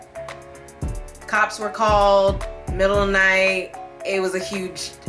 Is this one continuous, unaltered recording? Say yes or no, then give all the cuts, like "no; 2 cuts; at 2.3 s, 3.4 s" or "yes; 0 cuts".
no; 1 cut; at 1.1 s